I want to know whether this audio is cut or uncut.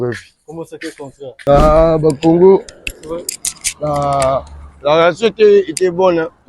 cut